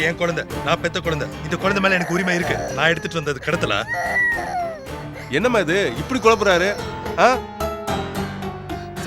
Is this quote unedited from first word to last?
yes; 0 cuts

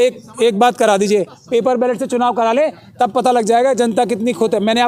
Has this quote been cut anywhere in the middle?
no; 0 cuts

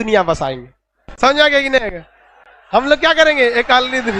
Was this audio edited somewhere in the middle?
no; 0 cuts

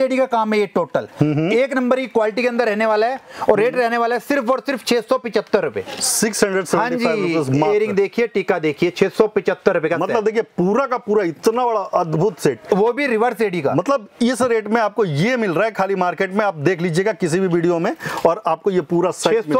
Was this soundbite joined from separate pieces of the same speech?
no; 0 cuts

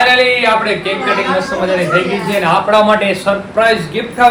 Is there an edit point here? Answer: no; 0 cuts

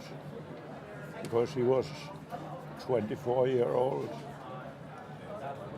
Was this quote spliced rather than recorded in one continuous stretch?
yes; 1 cut; at 3.8 s

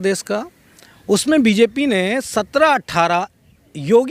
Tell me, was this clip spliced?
no; 0 cuts

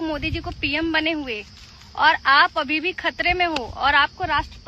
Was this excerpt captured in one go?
yes; 0 cuts

